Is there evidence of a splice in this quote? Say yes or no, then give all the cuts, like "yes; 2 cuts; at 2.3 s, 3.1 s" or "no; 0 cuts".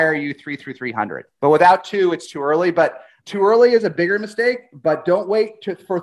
yes; 2 cuts; at 1.2 s, 3.1 s